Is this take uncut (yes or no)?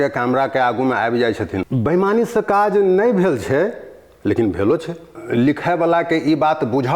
no